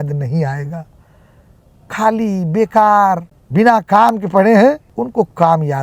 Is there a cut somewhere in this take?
yes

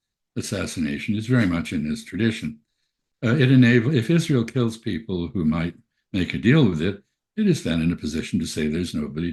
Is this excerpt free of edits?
yes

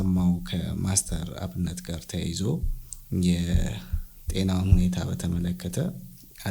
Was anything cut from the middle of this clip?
no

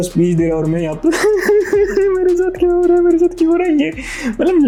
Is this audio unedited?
yes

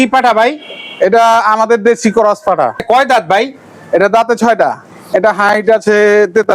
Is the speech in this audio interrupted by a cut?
yes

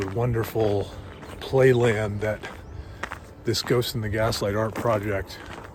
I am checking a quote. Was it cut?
no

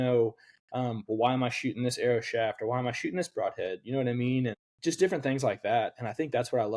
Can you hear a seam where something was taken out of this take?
yes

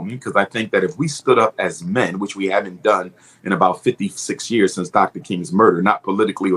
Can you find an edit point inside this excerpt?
no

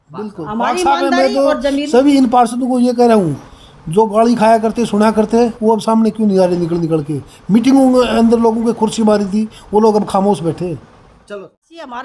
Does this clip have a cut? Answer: yes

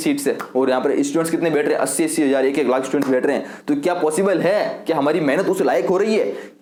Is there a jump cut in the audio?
no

